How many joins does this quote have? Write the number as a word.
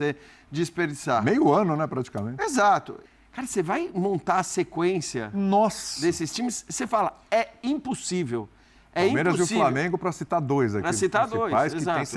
one